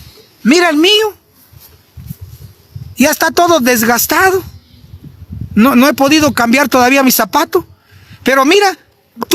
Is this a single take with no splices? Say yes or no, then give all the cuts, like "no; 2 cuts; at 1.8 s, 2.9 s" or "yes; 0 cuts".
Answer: yes; 0 cuts